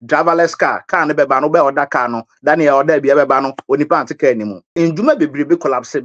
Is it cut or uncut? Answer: cut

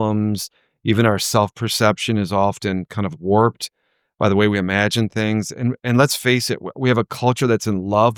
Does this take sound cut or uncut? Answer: uncut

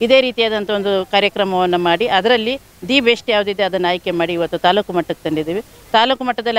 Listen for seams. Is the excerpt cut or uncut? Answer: uncut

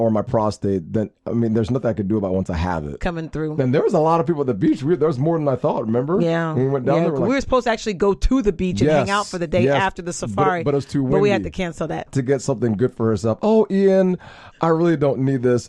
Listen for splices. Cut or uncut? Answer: cut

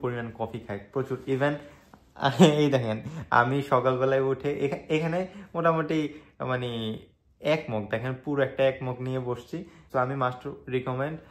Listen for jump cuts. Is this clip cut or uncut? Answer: cut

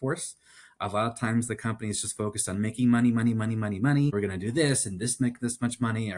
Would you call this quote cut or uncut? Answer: cut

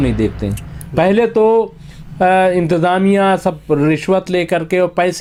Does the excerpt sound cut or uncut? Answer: uncut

